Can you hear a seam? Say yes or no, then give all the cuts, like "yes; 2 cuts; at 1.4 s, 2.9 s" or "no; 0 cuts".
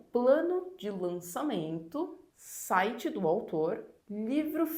no; 0 cuts